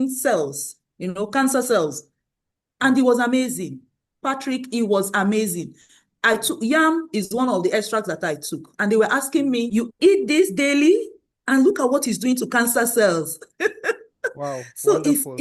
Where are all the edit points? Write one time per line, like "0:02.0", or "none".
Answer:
0:09.7